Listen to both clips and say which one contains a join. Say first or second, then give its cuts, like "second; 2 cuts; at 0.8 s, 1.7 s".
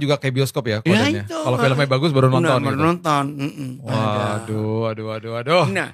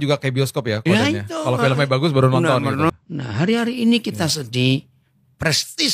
second; 1 cut; at 2.9 s